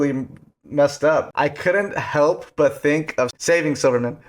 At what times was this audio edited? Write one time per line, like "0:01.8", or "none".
0:01.3
0:03.4